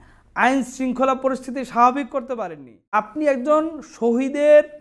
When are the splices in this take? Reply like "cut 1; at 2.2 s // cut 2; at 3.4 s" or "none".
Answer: cut 1; at 2.7 s